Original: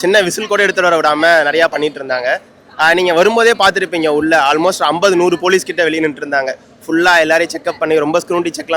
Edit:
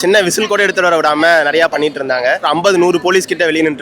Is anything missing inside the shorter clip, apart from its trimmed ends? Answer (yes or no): yes